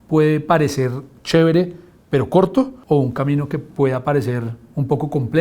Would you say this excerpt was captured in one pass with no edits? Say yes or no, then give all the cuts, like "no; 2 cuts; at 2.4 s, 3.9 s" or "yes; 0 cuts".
no; 1 cut; at 2.8 s